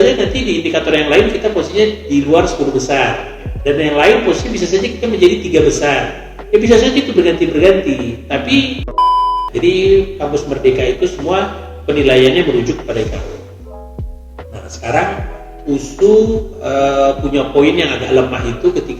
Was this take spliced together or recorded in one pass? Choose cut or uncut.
cut